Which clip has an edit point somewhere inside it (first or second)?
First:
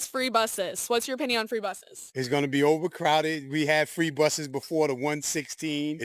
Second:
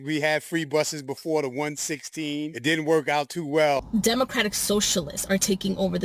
second